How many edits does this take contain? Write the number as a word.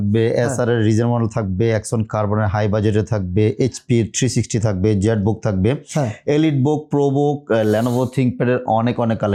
zero